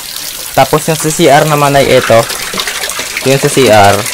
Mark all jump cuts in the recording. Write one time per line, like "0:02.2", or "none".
none